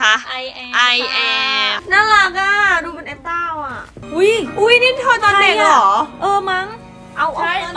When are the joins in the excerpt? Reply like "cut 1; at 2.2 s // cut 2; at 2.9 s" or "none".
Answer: cut 1; at 1.8 s // cut 2; at 3.9 s

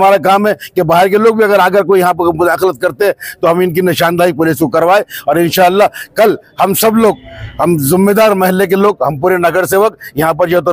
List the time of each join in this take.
none

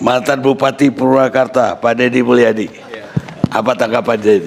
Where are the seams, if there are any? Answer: none

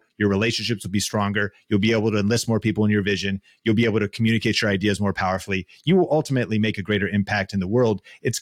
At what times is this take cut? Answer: none

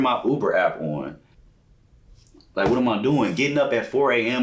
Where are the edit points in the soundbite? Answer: cut 1; at 1.3 s

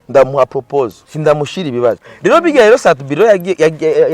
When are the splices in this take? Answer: cut 1; at 1.0 s // cut 2; at 2.1 s

